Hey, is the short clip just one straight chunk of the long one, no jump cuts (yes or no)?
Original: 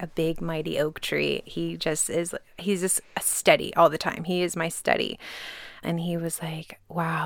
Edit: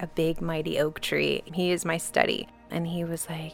no